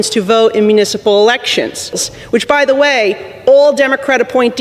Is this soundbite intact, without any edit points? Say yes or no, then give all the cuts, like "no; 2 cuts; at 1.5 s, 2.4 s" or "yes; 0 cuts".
no; 1 cut; at 2.1 s